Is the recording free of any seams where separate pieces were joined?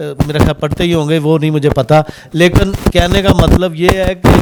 yes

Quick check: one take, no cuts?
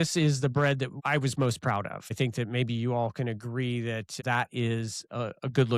no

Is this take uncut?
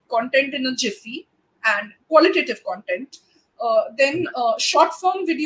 yes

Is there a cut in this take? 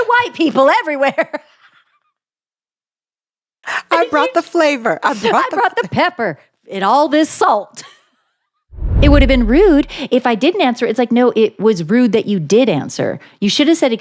yes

